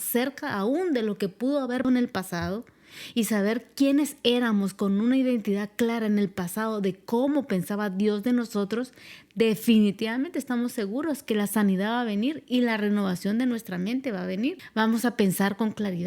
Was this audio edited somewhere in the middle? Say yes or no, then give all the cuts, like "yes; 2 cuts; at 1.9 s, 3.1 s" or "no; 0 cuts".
yes; 2 cuts; at 1.8 s, 14.6 s